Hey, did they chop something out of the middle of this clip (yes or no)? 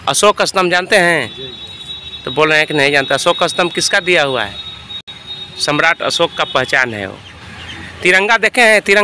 no